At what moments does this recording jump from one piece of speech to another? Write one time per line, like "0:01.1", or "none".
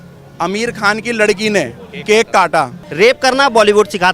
0:02.8